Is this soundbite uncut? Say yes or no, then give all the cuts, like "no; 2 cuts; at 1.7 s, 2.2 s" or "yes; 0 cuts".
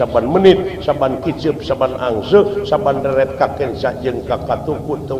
yes; 0 cuts